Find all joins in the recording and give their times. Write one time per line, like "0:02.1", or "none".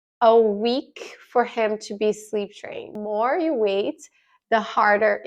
0:03.0